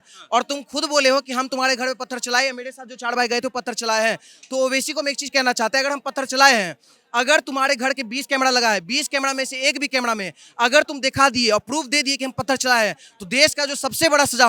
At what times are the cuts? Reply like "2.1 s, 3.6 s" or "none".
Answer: none

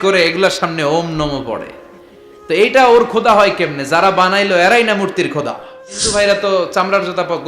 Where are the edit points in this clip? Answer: 6.0 s

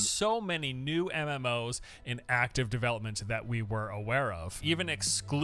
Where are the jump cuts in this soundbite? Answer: 4.2 s

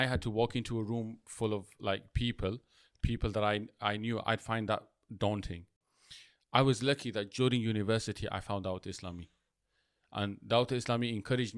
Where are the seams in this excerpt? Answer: none

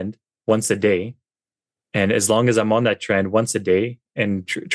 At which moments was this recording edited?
none

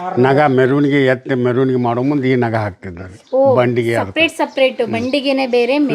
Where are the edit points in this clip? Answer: none

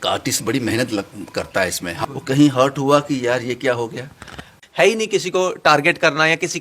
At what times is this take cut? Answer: 2.0 s, 4.5 s

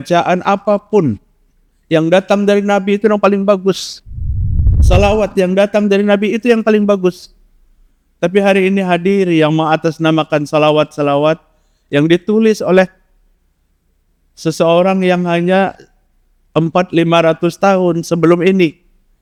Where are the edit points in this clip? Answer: none

